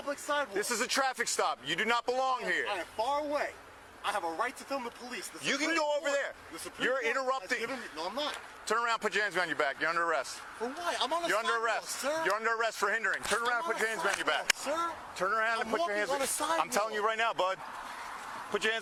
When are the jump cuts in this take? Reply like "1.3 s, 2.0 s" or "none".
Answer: none